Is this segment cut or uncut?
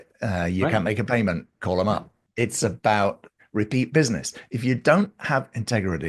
cut